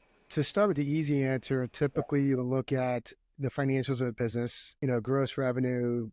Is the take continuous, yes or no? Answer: no